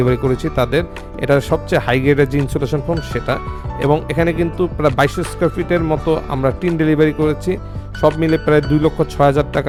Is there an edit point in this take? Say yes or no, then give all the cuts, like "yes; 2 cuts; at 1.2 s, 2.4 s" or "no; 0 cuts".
no; 0 cuts